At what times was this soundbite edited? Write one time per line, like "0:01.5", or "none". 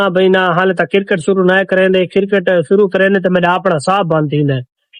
none